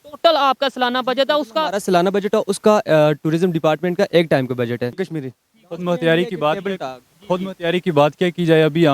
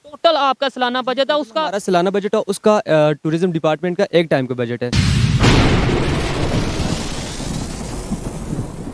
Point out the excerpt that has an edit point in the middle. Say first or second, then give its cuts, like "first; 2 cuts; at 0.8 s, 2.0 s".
first; 1 cut; at 4.9 s